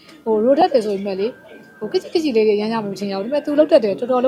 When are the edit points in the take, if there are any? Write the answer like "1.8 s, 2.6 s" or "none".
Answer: none